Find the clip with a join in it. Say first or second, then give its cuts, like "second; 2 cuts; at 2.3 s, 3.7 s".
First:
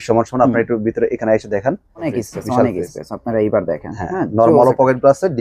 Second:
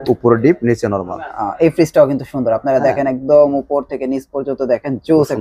first; 1 cut; at 2.2 s